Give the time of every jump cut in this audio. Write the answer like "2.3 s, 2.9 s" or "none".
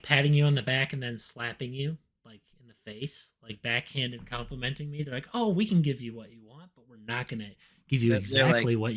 none